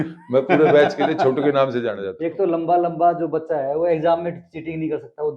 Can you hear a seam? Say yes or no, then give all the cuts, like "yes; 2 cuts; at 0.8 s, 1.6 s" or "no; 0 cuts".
yes; 1 cut; at 2.1 s